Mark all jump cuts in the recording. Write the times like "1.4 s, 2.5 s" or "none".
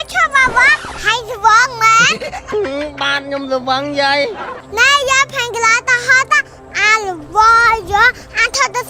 4.6 s